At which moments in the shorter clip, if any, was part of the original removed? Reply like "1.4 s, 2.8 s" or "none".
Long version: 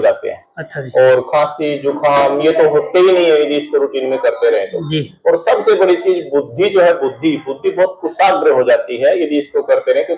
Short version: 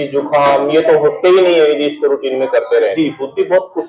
2.9 s